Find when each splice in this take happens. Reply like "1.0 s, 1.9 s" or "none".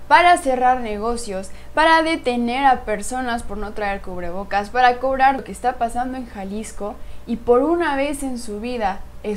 5.4 s